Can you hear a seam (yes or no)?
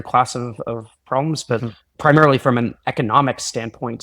yes